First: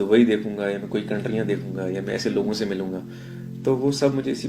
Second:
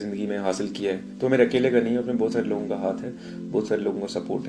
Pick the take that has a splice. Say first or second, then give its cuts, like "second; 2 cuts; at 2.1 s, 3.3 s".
second; 1 cut; at 1.1 s